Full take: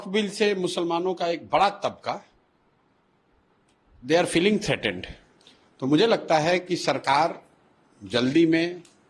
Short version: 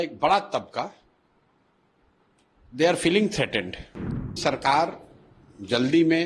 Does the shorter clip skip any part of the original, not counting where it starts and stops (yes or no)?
yes